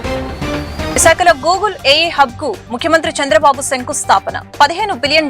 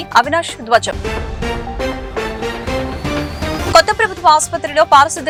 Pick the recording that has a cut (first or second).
first